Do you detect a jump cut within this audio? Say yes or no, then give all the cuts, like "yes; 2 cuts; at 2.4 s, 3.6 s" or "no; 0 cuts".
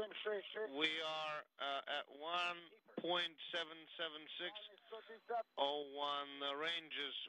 no; 0 cuts